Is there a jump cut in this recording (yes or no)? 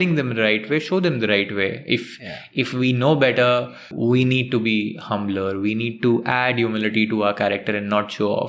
yes